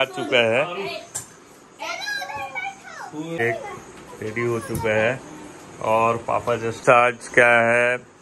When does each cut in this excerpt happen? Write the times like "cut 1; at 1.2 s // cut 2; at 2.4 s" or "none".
cut 1; at 6.8 s